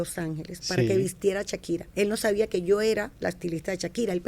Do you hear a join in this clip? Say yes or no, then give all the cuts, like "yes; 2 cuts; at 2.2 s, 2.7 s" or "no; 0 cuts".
yes; 1 cut; at 1.9 s